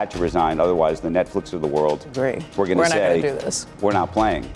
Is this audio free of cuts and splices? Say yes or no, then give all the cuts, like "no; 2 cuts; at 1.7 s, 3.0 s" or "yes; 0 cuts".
no; 1 cut; at 2.4 s